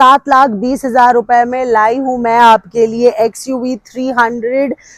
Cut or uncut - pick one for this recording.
uncut